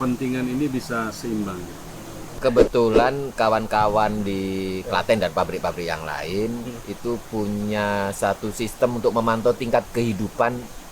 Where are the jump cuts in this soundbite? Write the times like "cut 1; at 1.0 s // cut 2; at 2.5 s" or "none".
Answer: cut 1; at 2.3 s